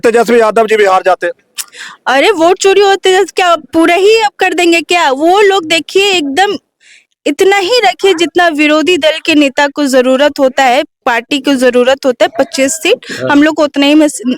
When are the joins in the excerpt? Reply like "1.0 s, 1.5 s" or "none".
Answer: none

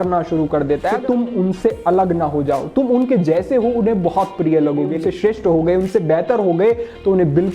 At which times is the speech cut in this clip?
1.0 s, 4.9 s

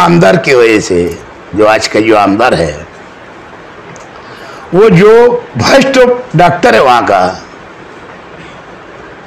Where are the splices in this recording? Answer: none

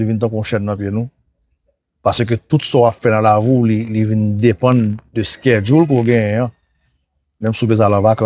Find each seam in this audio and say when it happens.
none

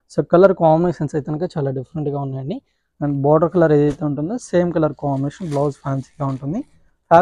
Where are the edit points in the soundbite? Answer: 2.8 s

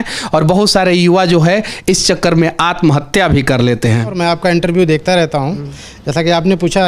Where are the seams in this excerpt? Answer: 4.2 s

